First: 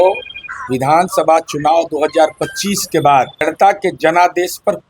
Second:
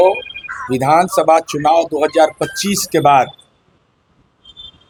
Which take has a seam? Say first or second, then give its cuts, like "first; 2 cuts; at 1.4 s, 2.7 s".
first; 1 cut; at 3.4 s